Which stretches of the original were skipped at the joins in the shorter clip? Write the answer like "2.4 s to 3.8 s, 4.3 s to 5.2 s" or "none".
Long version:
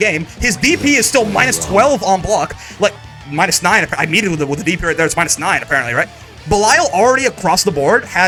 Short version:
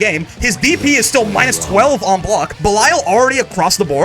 2.5 s to 6.4 s